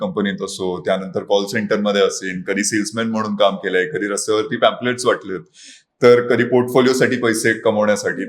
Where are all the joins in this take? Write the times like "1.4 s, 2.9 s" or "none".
none